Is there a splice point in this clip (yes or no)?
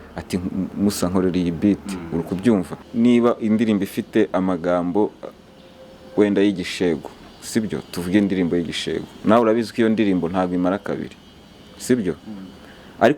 yes